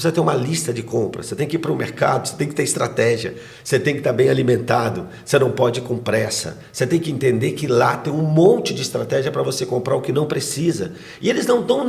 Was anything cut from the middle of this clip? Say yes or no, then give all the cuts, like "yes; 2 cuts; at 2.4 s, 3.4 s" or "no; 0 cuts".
no; 0 cuts